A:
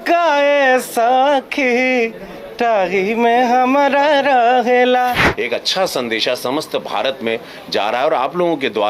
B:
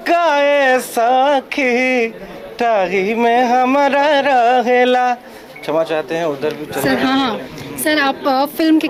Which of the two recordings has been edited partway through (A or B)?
A